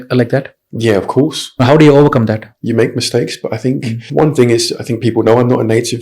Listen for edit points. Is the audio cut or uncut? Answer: cut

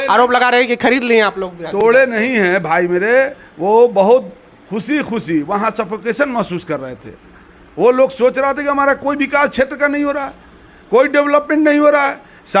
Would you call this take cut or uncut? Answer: uncut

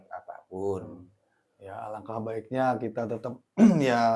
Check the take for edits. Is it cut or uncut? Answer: uncut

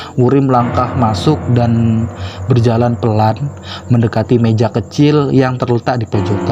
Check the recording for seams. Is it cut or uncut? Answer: uncut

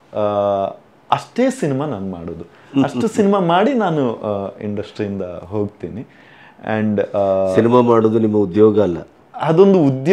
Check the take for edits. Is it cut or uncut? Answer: uncut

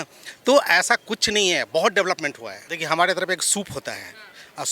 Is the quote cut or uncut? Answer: cut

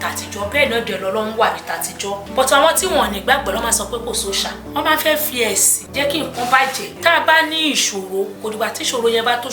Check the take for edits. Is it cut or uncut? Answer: cut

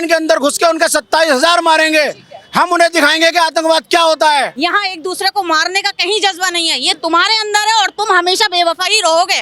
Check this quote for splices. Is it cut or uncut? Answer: cut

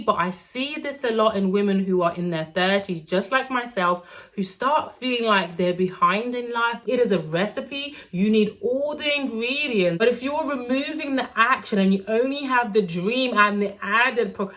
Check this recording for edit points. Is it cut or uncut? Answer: cut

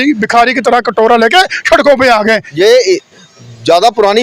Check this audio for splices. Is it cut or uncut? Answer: cut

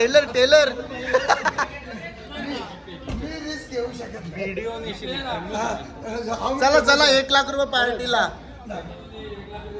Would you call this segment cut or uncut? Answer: uncut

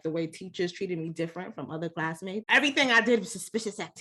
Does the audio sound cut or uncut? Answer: cut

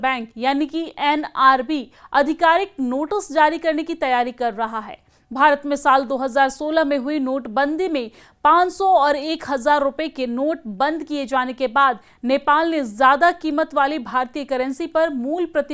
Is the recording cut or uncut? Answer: uncut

